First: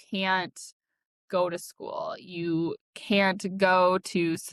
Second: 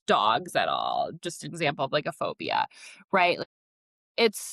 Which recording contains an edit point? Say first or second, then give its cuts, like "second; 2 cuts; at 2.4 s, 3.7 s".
second; 1 cut; at 3.4 s